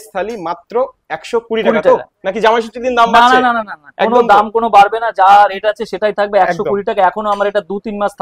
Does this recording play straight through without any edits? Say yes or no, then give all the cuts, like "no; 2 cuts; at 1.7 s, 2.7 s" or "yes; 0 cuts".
yes; 0 cuts